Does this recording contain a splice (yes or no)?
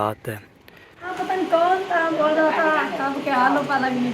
yes